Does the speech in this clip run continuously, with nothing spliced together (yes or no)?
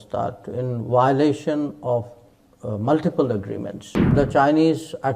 no